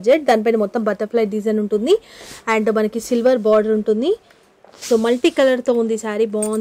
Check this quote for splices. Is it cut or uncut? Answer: uncut